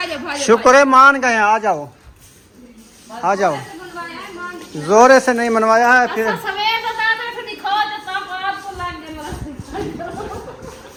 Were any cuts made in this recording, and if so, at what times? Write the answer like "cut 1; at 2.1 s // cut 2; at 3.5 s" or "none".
none